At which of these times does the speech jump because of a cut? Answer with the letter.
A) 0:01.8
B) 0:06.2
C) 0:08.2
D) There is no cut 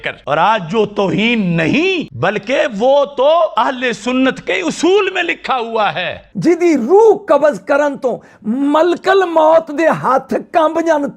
B